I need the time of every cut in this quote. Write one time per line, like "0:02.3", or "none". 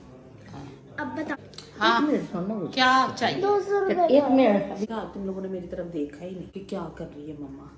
0:01.3
0:04.8
0:06.5